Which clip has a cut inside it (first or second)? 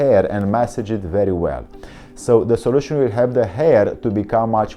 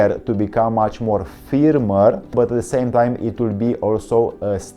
second